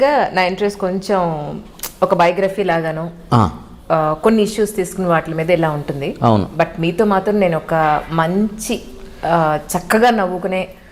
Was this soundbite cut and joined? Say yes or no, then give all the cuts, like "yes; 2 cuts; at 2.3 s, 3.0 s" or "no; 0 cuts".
no; 0 cuts